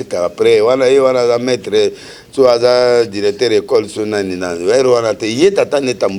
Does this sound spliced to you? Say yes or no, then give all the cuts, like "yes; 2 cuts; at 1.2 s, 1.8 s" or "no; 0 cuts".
no; 0 cuts